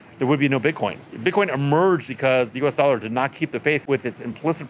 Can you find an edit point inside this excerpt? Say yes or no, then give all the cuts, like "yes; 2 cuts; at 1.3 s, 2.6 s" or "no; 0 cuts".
yes; 3 cuts; at 1.1 s, 2.2 s, 3.8 s